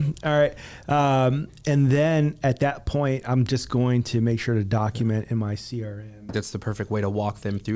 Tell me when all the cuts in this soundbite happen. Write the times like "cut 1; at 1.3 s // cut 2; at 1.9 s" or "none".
cut 1; at 5.9 s